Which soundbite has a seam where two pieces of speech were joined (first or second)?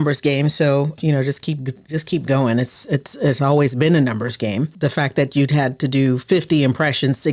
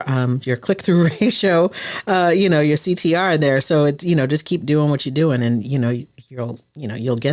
first